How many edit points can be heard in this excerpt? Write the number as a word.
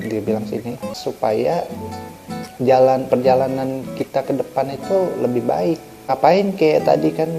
two